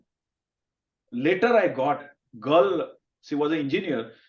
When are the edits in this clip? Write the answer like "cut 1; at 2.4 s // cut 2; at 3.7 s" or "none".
cut 1; at 2.1 s